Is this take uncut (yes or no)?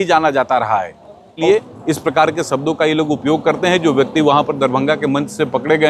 no